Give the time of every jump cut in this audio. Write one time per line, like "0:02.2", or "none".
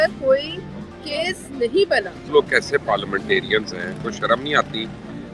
0:02.3